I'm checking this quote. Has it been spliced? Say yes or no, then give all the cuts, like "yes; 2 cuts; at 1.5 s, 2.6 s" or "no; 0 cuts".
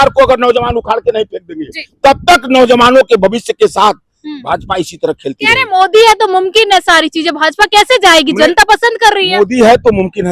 no; 0 cuts